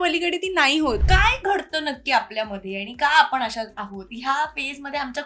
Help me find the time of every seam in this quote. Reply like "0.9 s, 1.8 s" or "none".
1.0 s